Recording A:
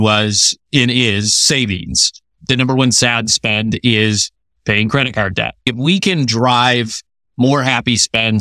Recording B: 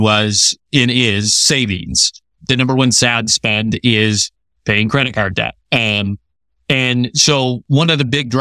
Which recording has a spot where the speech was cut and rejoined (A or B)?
A